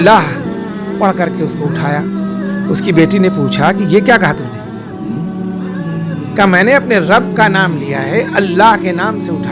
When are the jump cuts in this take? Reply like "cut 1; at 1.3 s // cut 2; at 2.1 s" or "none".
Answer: cut 1; at 4.4 s // cut 2; at 6.3 s